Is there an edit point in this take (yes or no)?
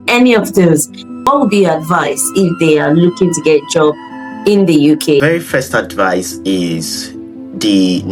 yes